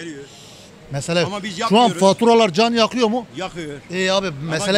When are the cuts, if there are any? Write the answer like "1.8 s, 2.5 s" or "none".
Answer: none